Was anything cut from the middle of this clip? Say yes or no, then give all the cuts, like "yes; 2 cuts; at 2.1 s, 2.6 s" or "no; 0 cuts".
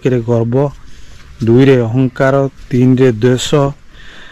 no; 0 cuts